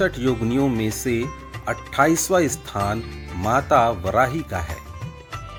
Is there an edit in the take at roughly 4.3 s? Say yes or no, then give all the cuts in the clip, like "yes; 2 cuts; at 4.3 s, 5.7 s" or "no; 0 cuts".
no; 0 cuts